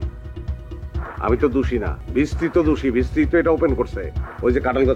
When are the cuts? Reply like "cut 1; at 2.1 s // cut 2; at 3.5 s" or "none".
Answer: cut 1; at 2.0 s

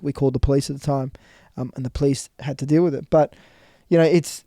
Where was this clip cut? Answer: none

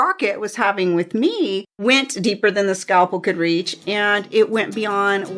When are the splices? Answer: cut 1; at 1.7 s

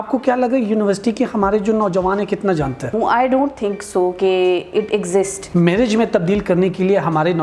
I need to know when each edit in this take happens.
cut 1; at 2.9 s // cut 2; at 5.4 s

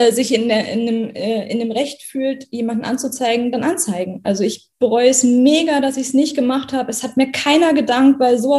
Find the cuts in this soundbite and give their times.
none

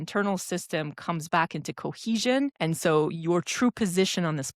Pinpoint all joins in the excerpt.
cut 1; at 2.6 s

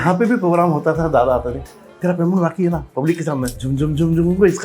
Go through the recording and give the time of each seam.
cut 1; at 3.6 s

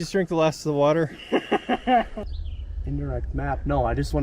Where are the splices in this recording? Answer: cut 1; at 2.1 s

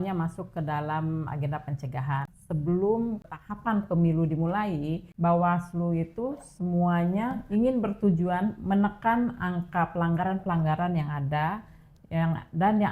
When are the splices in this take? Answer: cut 1; at 2.4 s // cut 2; at 3.3 s // cut 3; at 5.1 s // cut 4; at 7.4 s

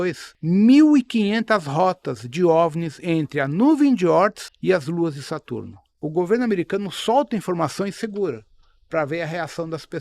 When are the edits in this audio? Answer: cut 1; at 6.0 s

